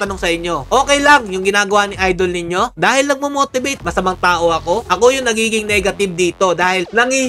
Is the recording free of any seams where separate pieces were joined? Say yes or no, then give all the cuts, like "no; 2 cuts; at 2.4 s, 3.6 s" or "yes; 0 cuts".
yes; 0 cuts